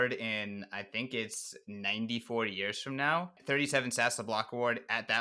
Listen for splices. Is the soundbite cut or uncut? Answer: cut